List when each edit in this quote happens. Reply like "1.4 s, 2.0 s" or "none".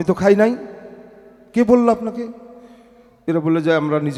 none